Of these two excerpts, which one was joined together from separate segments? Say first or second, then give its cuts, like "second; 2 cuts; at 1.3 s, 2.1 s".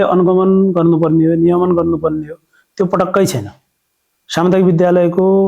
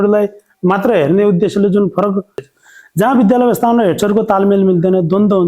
second; 1 cut; at 2.4 s